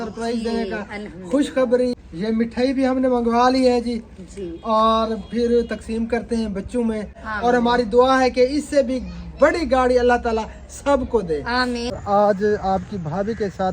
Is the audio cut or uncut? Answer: cut